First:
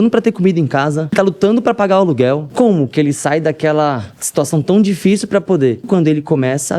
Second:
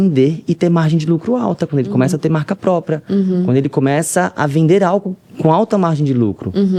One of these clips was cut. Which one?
first; 4 cuts; at 1.1 s, 2.5 s, 4.1 s, 5.8 s

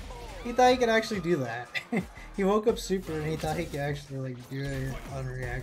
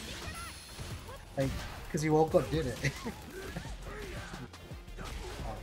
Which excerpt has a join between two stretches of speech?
second; 1 cut; at 4.5 s

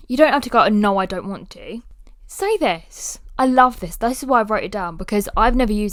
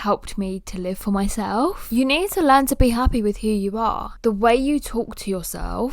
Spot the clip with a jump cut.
second; 2 cuts; at 1.8 s, 4.1 s

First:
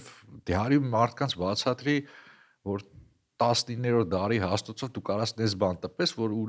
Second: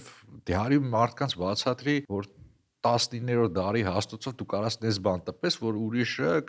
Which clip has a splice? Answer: second; 1 cut; at 2.1 s

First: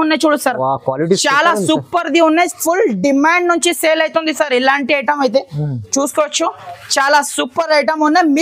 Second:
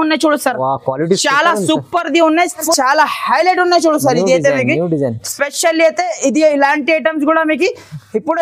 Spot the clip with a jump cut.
second; 1 cut; at 2.6 s

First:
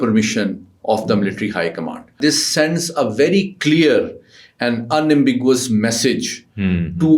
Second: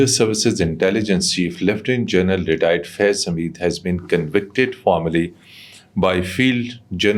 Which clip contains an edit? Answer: first; 1 cut; at 2.2 s

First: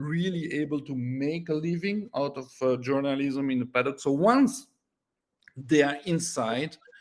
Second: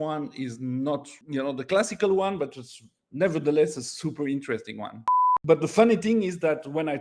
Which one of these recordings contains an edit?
second; 2 cuts; at 1.2 s, 5.3 s

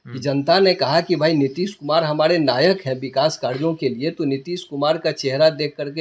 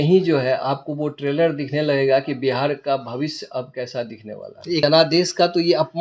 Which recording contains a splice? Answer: second; 1 cut; at 4.8 s

